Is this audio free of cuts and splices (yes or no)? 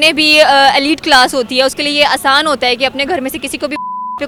yes